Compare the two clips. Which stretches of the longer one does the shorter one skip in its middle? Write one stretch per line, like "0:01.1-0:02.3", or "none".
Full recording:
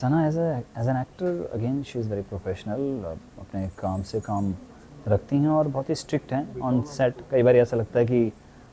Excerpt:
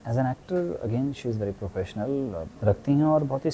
0:03.2-0:04.9